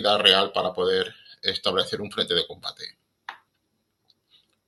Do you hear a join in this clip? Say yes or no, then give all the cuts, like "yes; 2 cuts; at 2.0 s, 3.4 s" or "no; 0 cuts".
no; 0 cuts